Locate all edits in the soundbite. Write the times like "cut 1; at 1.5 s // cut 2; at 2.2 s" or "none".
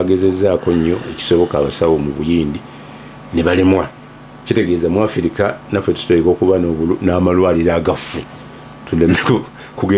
none